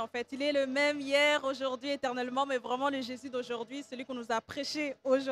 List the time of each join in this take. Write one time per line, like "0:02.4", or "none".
none